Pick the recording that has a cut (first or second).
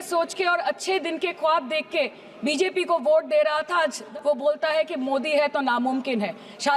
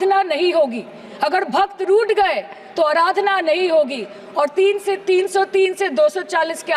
first